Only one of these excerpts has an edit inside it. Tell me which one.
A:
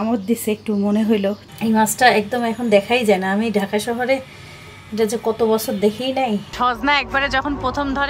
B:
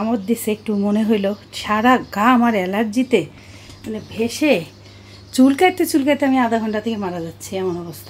A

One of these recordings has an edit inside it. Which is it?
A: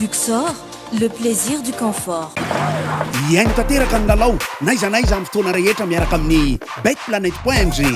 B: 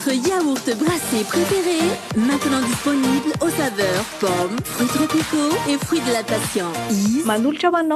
A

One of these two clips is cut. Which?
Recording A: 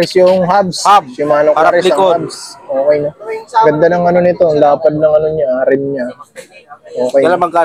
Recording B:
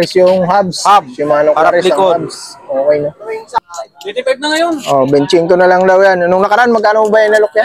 B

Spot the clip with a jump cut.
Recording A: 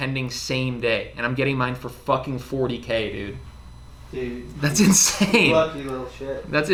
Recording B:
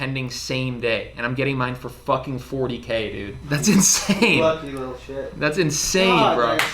B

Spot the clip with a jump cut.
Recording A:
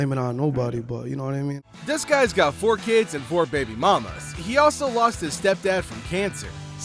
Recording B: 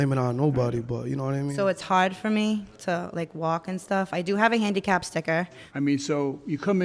B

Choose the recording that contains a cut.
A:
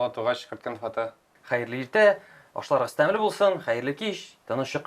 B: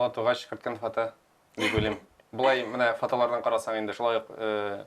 A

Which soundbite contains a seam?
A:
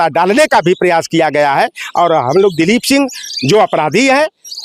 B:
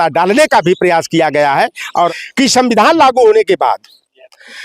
B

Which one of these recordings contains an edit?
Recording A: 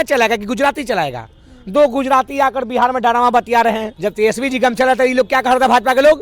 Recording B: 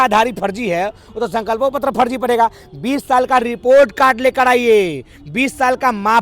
A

